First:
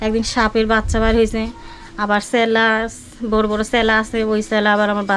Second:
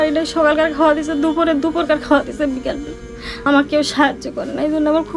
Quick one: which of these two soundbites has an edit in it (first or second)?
second